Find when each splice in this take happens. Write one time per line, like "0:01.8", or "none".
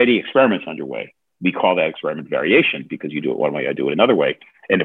none